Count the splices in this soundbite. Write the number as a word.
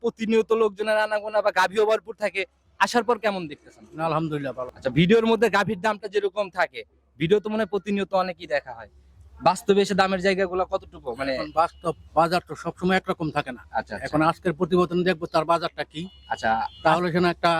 one